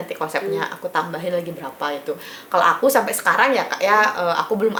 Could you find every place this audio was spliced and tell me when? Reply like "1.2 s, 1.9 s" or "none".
none